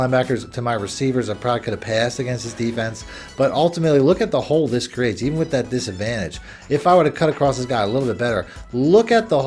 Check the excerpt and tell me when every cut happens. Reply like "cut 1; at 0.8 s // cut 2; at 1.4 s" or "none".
none